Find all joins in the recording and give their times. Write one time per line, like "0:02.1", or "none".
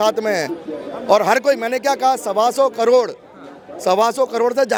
none